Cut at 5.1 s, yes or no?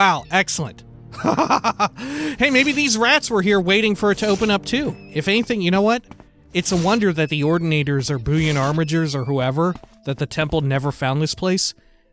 yes